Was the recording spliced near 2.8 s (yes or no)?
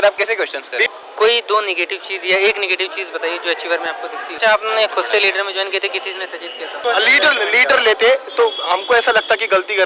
no